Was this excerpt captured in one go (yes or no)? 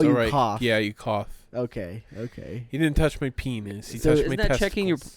yes